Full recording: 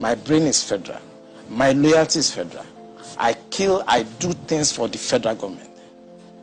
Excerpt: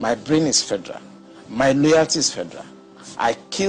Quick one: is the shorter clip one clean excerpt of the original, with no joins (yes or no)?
yes